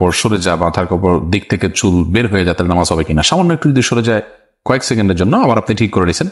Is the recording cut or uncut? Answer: uncut